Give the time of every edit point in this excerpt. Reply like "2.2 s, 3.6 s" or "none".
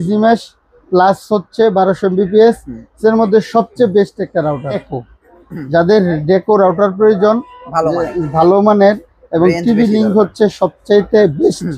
4.9 s

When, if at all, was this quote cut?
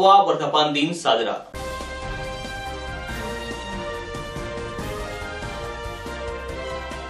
none

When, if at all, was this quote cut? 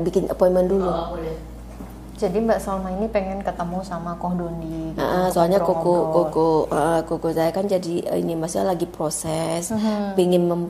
none

